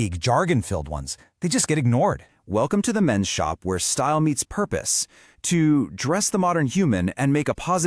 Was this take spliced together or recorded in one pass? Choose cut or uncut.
cut